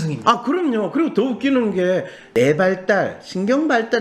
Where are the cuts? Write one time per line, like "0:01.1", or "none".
0:02.2

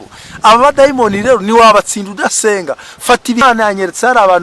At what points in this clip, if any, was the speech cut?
0:03.4

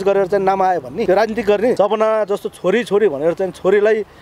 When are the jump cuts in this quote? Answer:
0:01.1
0:01.8

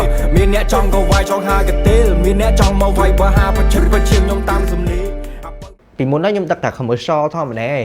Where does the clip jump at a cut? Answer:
0:05.6

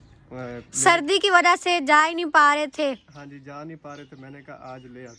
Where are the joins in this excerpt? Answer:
none

